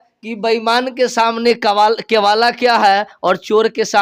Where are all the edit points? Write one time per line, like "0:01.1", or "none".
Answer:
none